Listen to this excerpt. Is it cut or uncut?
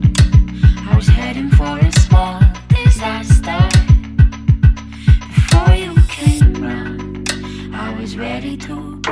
uncut